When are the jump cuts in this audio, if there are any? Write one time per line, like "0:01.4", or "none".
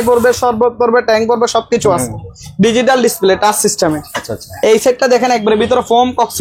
none